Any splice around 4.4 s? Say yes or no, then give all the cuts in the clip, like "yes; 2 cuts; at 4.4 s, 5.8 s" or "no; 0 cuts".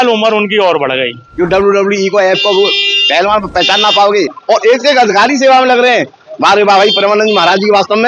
yes; 2 cuts; at 1.2 s, 4.4 s